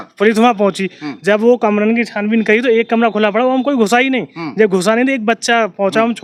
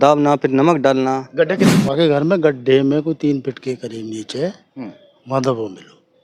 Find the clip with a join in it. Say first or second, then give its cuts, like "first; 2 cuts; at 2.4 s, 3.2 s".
second; 1 cut; at 1.7 s